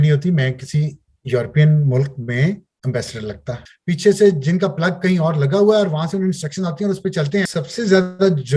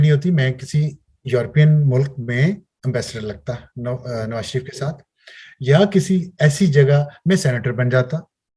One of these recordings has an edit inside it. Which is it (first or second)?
first